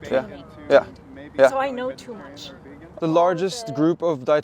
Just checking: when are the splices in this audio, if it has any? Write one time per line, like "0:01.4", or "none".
0:02.8